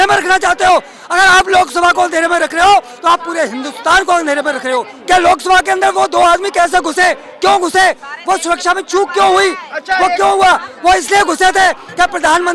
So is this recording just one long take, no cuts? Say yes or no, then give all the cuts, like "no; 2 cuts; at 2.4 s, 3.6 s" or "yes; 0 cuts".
no; 2 cuts; at 4.9 s, 10.7 s